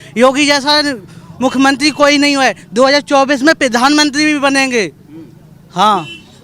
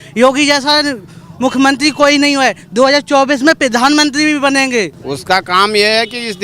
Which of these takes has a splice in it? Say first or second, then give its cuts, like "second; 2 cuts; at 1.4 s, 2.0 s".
second; 1 cut; at 5.1 s